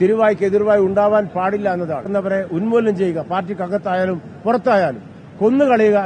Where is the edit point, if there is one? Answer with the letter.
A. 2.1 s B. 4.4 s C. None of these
A